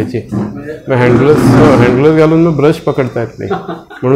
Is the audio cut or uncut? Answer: uncut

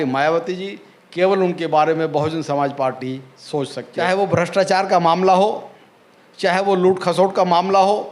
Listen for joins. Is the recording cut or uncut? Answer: cut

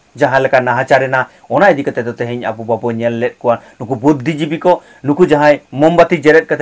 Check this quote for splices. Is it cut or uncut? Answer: uncut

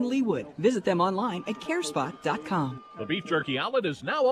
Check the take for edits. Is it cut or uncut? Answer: cut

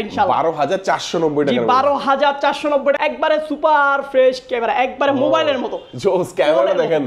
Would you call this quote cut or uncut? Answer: cut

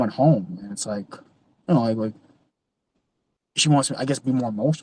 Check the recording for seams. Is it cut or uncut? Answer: uncut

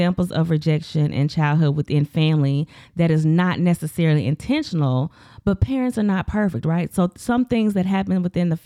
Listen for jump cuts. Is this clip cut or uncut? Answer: uncut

